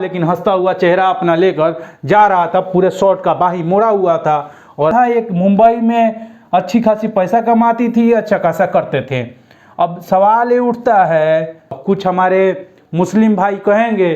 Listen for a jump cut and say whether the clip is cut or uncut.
cut